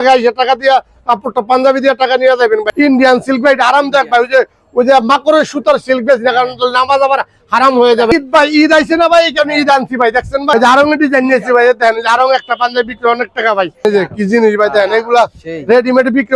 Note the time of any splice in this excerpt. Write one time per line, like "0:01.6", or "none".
0:02.7
0:08.1
0:10.5
0:13.8